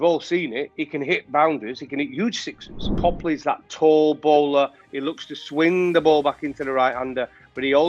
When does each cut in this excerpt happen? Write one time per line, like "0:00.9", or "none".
0:02.7

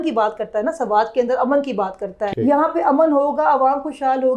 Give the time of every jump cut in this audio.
0:02.2

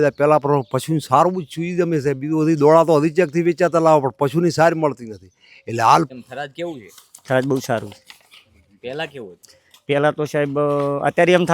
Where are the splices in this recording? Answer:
0:06.1

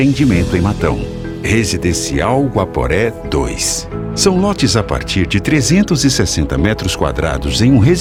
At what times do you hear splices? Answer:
none

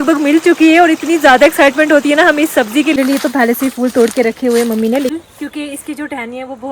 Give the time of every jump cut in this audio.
0:03.0
0:05.1

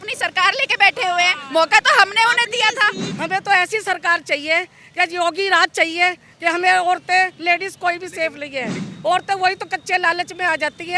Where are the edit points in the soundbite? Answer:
0:03.1
0:08.8

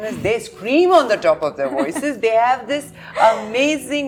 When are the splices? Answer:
none

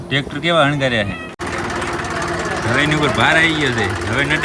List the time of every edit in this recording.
0:01.4

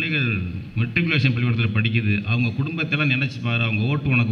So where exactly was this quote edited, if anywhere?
none

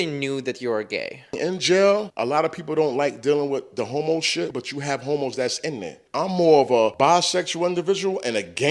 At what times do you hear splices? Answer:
0:01.3
0:02.1
0:04.5
0:05.9
0:06.9

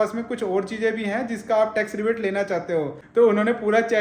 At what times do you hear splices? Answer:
0:03.0

